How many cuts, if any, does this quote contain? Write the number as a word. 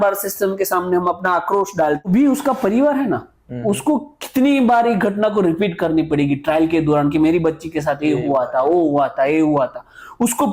one